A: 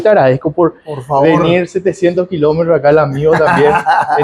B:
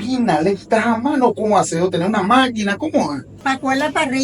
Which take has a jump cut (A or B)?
B